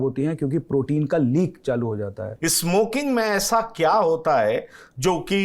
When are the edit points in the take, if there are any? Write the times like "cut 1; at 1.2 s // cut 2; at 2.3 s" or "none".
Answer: cut 1; at 2.2 s